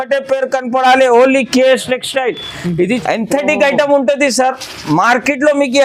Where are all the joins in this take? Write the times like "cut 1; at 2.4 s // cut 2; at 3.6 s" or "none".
cut 1; at 3.0 s